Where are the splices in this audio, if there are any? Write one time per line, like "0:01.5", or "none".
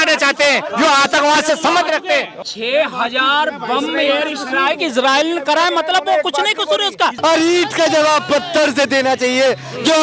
0:02.4
0:07.2